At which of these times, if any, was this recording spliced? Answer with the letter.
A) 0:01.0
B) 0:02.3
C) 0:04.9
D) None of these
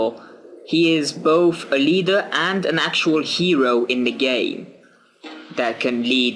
D